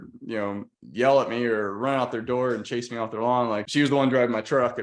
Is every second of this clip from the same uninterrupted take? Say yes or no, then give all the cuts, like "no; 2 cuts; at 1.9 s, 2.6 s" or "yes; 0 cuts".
no; 1 cut; at 3.7 s